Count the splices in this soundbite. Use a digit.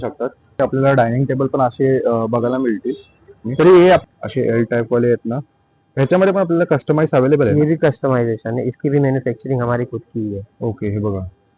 1